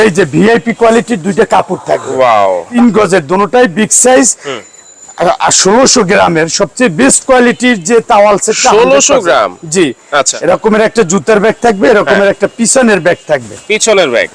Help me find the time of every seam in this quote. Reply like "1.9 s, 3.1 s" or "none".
2.7 s, 10.3 s